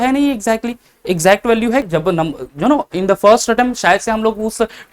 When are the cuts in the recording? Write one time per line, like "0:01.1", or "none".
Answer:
0:01.8